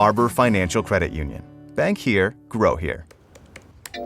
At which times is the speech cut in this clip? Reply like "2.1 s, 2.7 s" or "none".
3.1 s